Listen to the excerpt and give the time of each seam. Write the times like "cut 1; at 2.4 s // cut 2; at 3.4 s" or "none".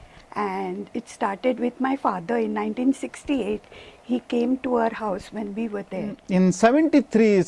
cut 1; at 6.2 s